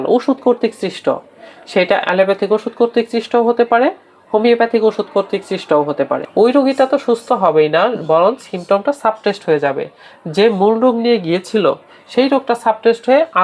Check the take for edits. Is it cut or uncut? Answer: cut